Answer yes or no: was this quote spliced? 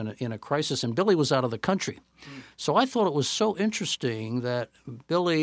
no